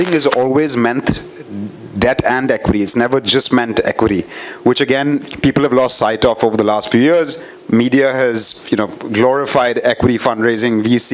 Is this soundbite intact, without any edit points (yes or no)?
yes